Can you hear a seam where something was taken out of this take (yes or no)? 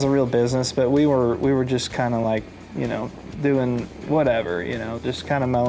no